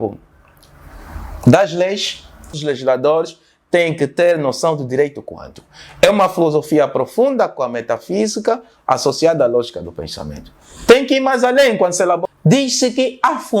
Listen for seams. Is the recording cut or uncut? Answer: cut